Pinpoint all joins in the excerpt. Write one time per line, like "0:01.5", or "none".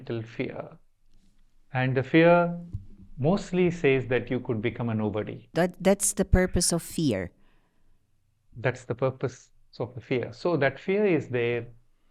none